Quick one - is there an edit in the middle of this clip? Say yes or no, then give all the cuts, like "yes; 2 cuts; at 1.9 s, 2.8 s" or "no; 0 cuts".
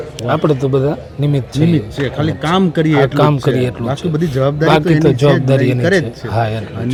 no; 0 cuts